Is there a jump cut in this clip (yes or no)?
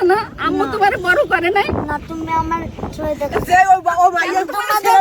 no